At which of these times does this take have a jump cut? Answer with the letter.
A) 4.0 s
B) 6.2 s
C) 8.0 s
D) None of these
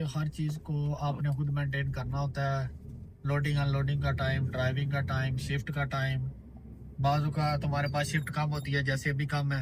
D